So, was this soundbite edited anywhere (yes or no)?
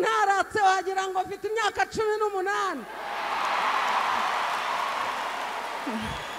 no